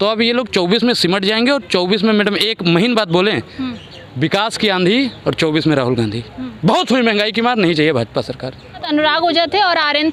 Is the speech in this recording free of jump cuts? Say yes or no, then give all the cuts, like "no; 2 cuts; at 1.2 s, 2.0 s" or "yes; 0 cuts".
yes; 0 cuts